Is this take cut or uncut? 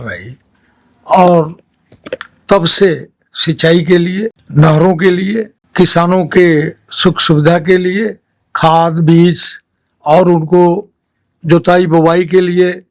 cut